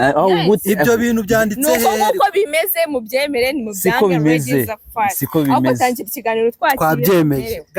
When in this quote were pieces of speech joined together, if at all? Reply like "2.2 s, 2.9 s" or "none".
none